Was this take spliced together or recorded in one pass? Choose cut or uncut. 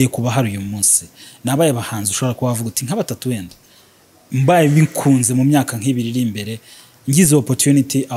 uncut